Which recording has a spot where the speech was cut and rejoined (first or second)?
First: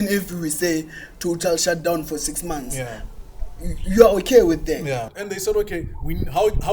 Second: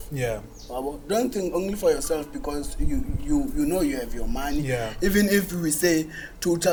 first